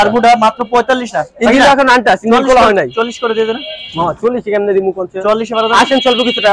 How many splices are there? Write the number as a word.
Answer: zero